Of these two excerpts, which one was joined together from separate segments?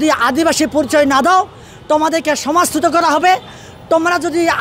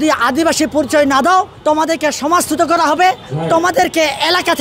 second; 2 cuts; at 1.5 s, 3.3 s

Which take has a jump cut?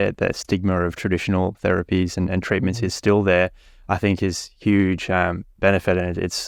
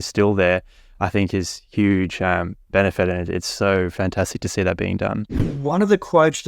second; 1 cut; at 5.4 s

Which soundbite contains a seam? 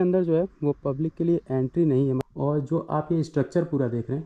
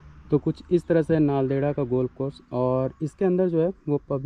first; 1 cut; at 2.2 s

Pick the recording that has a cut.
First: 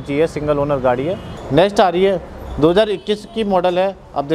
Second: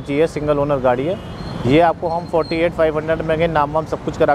first; 1 cut; at 1.3 s

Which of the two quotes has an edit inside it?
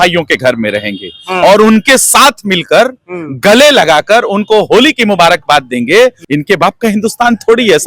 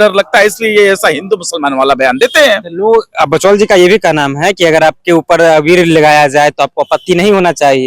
first; 1 cut; at 6.2 s

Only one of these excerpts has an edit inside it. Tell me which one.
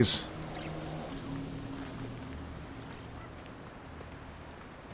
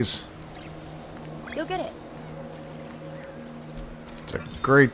first; 1 cut; at 1.1 s

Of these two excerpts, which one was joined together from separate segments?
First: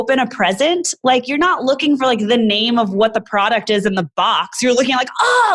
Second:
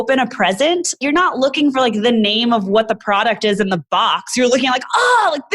second; 1 cut; at 1.0 s

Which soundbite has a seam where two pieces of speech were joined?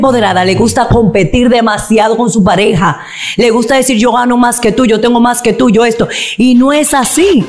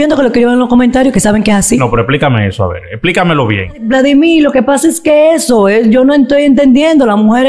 second; 1 cut; at 3.9 s

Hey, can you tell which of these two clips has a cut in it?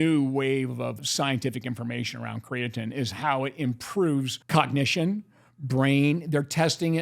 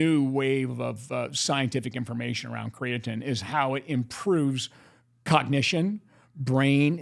first; 2 cuts; at 1.0 s, 4.4 s

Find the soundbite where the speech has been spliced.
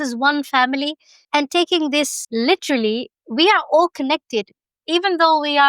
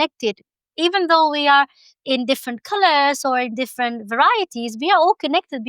first; 1 cut; at 2.2 s

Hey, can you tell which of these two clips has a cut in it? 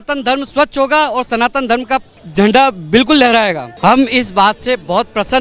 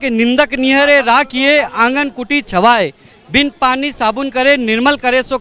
first; 2 cuts; at 2.2 s, 3.7 s

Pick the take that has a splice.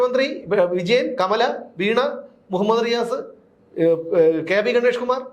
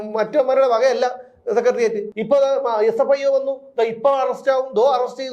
second; 1 cut; at 2.1 s

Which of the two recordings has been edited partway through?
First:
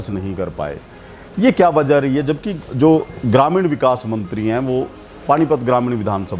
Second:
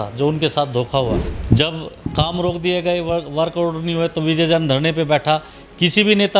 second; 1 cut; at 1.2 s

